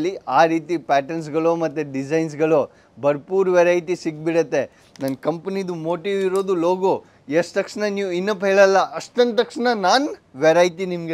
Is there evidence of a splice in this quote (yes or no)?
no